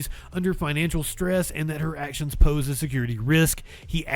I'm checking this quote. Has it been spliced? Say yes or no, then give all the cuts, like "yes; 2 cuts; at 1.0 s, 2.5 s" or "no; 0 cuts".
no; 0 cuts